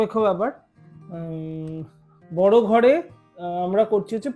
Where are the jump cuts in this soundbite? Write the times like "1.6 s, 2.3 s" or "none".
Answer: none